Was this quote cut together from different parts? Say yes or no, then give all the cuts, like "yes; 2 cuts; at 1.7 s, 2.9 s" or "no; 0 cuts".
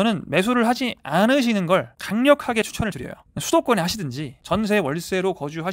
yes; 1 cut; at 4.4 s